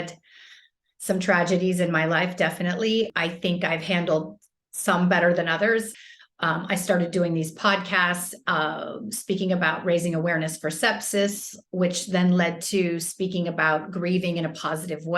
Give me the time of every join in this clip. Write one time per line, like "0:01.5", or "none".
0:06.0